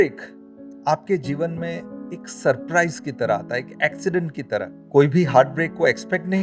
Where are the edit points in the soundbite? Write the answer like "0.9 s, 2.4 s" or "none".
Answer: 4.8 s